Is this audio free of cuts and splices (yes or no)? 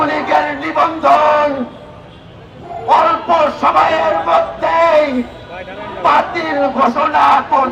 yes